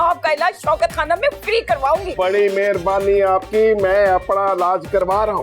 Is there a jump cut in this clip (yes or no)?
yes